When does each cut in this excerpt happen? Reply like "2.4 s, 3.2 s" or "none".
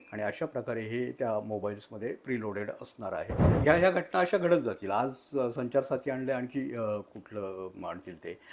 3.6 s